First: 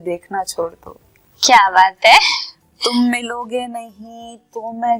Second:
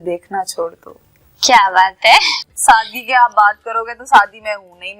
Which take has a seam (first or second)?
second